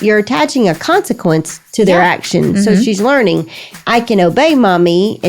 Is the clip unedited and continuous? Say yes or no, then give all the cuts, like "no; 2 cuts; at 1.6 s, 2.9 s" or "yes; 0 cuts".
no; 1 cut; at 1.5 s